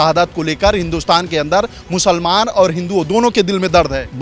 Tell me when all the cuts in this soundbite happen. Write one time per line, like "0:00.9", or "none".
none